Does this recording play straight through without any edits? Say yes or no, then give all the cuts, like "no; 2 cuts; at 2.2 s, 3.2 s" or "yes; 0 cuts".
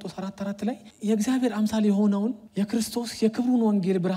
no; 2 cuts; at 0.9 s, 2.4 s